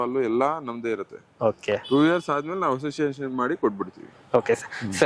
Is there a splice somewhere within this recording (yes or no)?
no